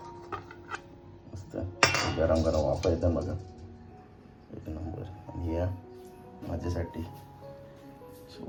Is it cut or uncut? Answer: uncut